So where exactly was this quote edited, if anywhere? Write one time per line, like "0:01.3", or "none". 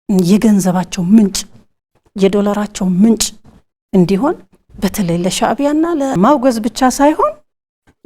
0:06.1